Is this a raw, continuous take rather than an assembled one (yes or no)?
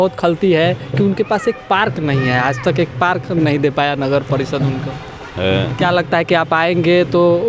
yes